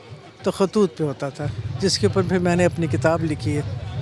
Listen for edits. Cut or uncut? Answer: uncut